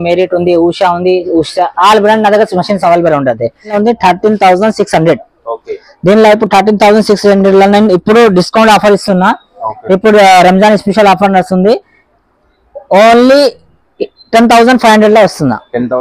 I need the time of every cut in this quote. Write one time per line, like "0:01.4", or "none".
0:03.8

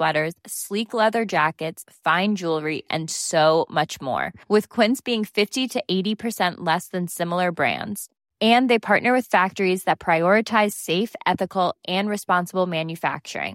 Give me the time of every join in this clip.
none

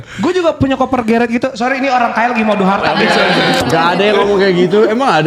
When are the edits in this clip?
0:03.6

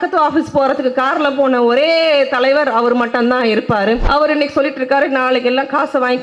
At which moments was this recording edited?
0:04.0

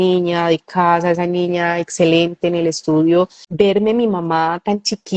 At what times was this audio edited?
0:03.4

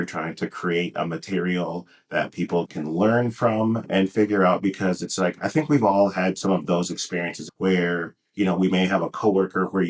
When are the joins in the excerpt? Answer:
0:02.7
0:03.8
0:07.4

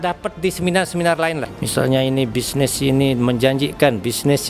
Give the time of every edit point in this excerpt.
0:01.5

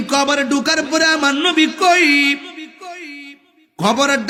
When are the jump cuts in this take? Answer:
none

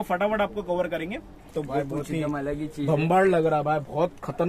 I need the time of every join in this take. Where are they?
0:01.5

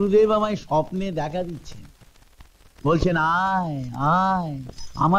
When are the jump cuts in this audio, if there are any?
none

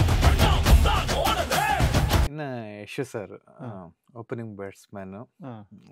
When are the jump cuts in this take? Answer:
none

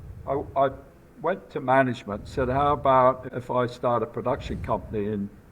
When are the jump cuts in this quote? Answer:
0:03.3

